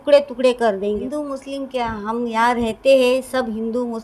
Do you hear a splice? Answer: yes; 1 cut; at 1.0 s

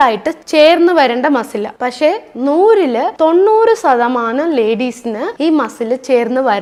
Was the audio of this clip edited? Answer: no; 0 cuts

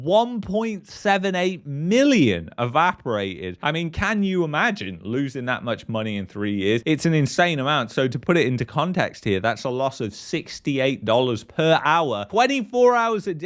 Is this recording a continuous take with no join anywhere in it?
yes; 0 cuts

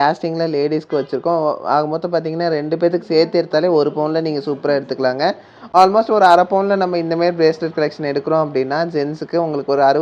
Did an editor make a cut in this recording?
no; 0 cuts

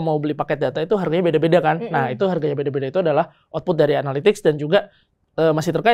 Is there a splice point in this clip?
no; 0 cuts

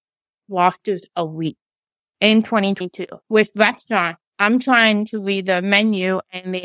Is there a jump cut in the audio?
yes; 1 cut; at 3.2 s

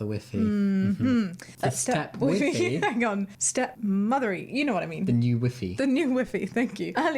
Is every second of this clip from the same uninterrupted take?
yes; 0 cuts

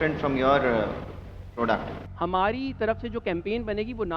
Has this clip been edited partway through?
yes; 1 cut; at 2.0 s

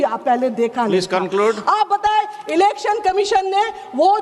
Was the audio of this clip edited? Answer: no; 0 cuts

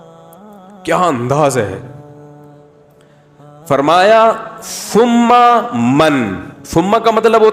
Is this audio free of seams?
no; 3 cuts; at 0.8 s, 1.9 s, 3.7 s

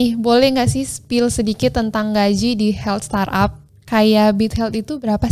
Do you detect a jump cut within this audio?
no; 0 cuts

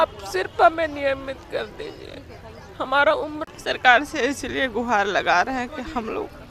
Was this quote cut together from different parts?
yes; 1 cut; at 3.4 s

